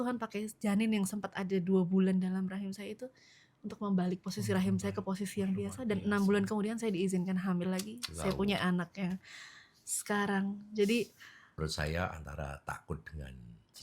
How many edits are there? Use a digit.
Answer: 1